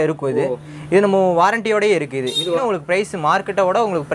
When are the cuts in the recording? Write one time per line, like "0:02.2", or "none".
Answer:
0:02.6